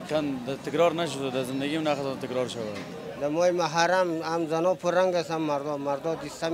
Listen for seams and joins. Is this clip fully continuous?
no; 1 cut; at 3.0 s

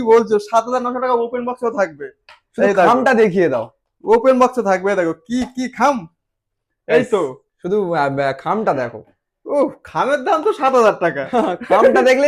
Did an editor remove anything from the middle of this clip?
no; 0 cuts

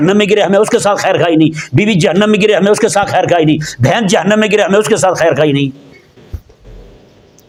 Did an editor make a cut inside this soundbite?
no; 0 cuts

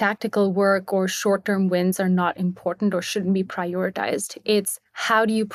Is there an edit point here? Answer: no; 0 cuts

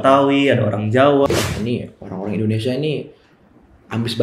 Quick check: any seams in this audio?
yes; 1 cut; at 1.3 s

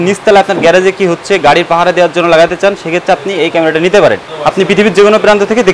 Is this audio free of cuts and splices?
no; 1 cut; at 4.3 s

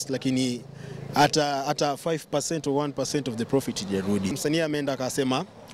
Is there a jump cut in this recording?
yes; 1 cut; at 4.4 s

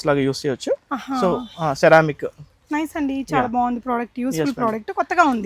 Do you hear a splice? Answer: no; 0 cuts

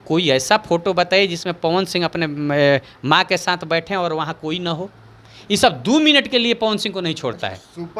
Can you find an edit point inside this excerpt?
no; 0 cuts

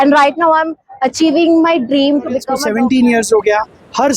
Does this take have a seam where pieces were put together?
yes; 1 cut; at 2.6 s

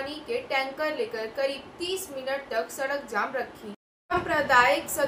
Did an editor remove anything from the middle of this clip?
yes; 1 cut; at 3.9 s

